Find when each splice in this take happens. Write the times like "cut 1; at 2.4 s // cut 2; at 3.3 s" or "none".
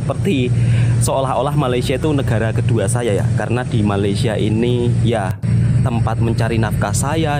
none